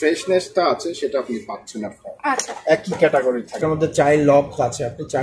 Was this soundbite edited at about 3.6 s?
yes; 1 cut; at 3.6 s

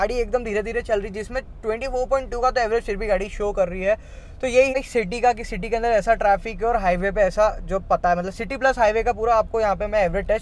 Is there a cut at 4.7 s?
yes; 1 cut; at 4.7 s

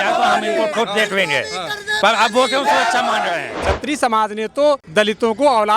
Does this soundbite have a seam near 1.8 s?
no; 2 cuts; at 3.5 s, 4.8 s

